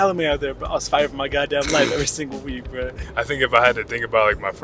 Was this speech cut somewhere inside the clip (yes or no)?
yes